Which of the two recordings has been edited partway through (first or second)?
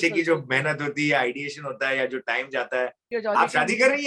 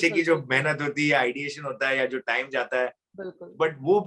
first